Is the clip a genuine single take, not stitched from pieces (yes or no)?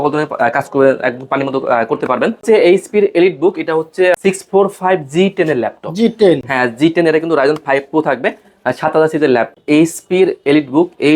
no